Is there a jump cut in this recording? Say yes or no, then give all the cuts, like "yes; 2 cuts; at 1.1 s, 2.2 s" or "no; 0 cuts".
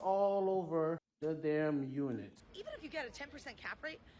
yes; 2 cuts; at 1.1 s, 2.3 s